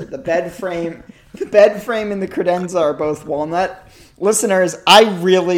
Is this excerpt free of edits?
yes; 0 cuts

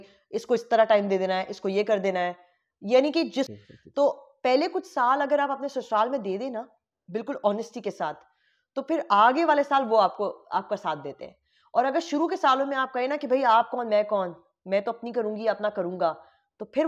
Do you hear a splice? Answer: yes; 1 cut; at 3.5 s

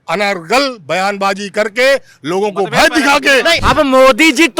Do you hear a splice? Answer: yes; 1 cut; at 3.6 s

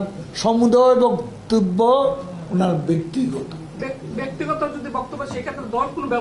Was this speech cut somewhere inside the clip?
no; 0 cuts

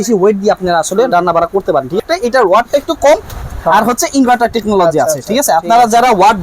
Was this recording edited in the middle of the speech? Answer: yes; 1 cut; at 2.0 s

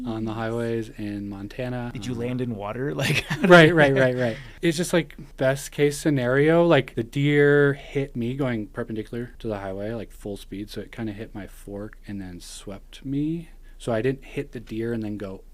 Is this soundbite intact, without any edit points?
no; 6 cuts; at 1.9 s, 4.5 s, 5.2 s, 7.0 s, 8.1 s, 9.3 s

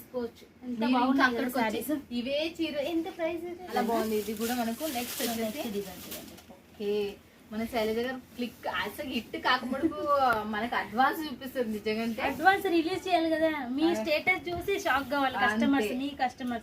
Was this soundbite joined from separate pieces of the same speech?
yes; 1 cut; at 3.7 s

